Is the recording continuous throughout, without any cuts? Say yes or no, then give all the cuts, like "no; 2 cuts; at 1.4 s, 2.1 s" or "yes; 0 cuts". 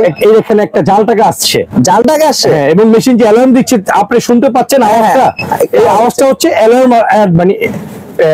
yes; 0 cuts